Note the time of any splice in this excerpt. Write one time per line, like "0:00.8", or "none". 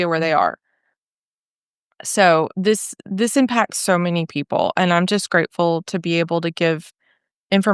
none